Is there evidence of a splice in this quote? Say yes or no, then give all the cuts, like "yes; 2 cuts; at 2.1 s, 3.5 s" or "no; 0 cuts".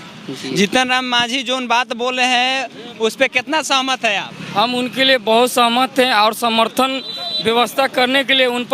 no; 0 cuts